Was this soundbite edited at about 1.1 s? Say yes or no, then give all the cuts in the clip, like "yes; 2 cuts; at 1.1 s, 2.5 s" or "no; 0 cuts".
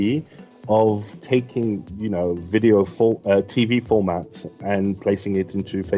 yes; 1 cut; at 1.1 s